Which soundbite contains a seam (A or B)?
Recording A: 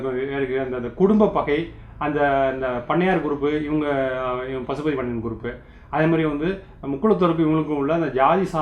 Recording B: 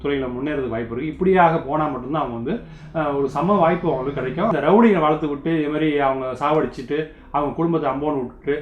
B